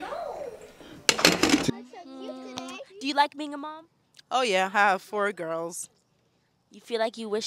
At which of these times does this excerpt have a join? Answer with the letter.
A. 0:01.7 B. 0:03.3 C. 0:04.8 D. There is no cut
A